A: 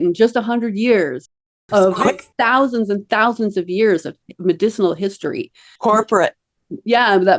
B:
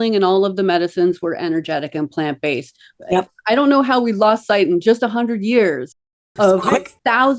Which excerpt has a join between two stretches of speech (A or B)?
A